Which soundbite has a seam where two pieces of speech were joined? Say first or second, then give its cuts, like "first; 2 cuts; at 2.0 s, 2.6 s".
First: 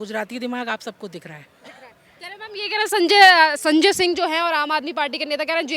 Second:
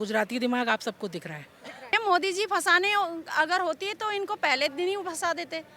second; 1 cut; at 1.9 s